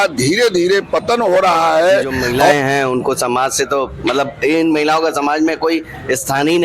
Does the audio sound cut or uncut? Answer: cut